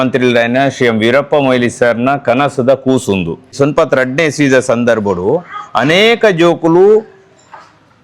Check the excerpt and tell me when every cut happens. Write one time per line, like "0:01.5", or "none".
0:03.5